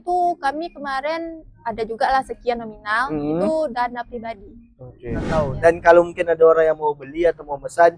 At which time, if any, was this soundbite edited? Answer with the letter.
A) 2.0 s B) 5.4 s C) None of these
B